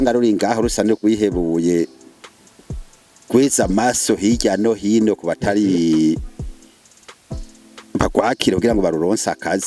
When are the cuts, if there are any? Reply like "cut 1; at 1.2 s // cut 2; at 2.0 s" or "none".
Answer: cut 1; at 6.2 s // cut 2; at 7.9 s